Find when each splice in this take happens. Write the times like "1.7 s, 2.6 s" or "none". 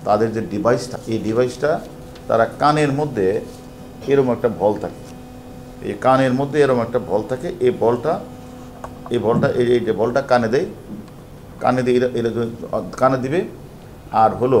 0.9 s, 5.7 s